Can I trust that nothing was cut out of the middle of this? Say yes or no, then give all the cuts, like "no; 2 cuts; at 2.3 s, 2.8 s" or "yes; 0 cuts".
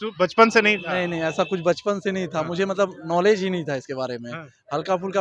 yes; 0 cuts